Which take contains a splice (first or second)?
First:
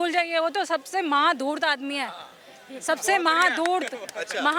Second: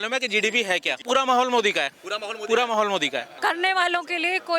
second